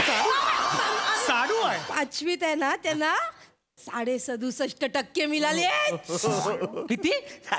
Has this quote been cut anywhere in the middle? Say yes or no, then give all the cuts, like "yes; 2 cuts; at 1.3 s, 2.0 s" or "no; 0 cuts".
yes; 1 cut; at 1.9 s